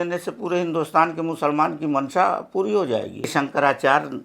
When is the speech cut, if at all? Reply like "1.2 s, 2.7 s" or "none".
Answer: 3.3 s